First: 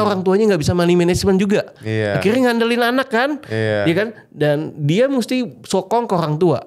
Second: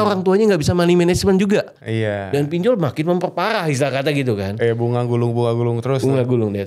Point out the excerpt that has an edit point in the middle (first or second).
second